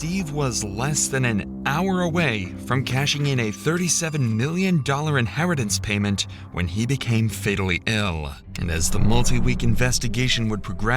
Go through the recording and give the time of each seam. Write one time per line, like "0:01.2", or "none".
0:05.8